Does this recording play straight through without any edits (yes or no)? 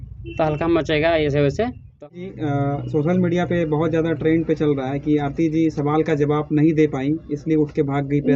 no